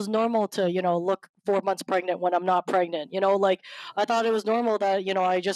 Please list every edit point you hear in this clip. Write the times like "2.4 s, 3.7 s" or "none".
none